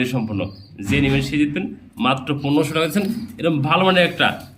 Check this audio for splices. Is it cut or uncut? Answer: uncut